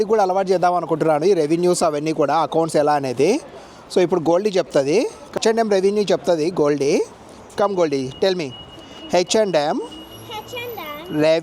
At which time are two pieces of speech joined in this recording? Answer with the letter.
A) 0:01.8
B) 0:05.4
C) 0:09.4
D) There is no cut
B